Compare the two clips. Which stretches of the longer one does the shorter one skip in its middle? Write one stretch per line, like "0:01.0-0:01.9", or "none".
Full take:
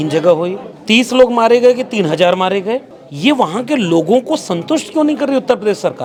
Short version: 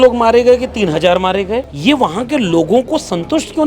0:02.9-0:03.1